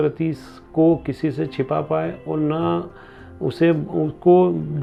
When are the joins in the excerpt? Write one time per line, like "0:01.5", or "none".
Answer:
none